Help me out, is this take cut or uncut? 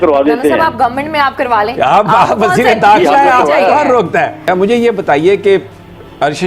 cut